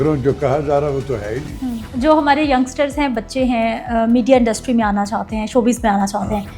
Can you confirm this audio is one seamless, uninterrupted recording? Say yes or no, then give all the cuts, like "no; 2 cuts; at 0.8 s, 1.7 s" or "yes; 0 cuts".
no; 1 cut; at 1.9 s